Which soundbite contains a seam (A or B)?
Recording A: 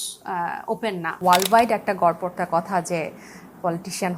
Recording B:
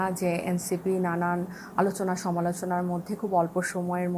A